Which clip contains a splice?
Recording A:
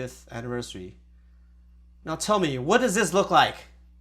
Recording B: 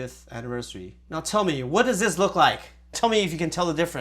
B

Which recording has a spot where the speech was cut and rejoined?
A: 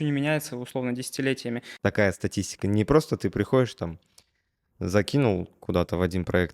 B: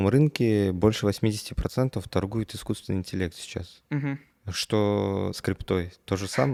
A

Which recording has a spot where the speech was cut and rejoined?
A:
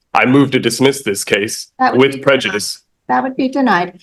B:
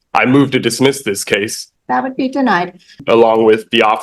B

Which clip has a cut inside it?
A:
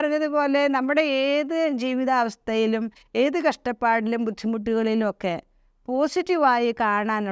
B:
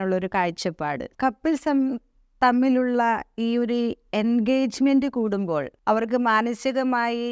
B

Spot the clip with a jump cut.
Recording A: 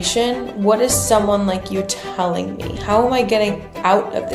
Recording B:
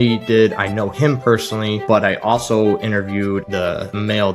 B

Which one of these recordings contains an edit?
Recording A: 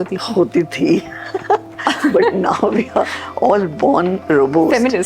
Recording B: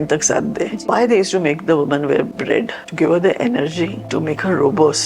B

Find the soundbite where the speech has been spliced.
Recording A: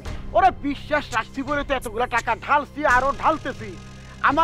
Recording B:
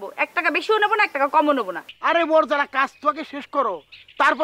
B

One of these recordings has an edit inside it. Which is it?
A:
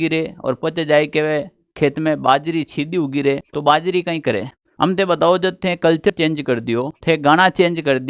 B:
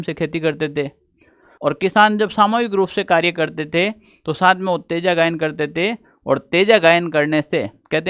A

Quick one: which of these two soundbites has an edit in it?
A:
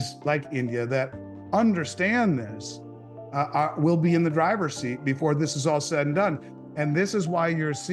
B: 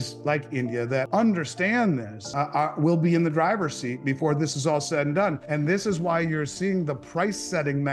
B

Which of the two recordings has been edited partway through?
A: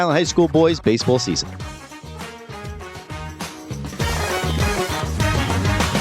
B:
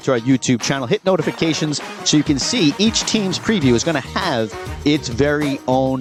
A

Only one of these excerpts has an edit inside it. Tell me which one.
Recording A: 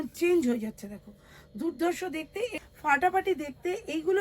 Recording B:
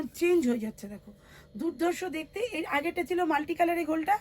A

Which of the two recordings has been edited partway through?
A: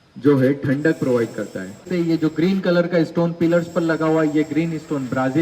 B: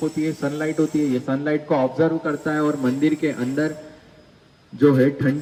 A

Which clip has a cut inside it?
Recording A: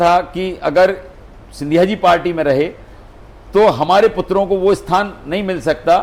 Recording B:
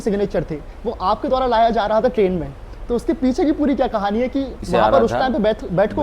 B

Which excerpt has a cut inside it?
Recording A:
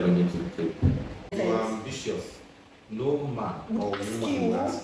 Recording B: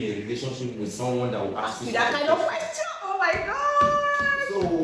A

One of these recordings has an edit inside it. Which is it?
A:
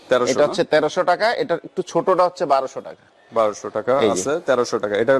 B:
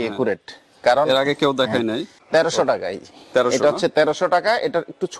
B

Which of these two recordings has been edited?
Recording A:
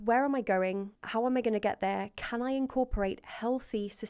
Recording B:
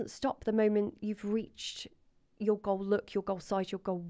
A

